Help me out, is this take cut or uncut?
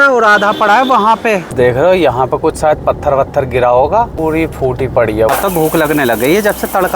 cut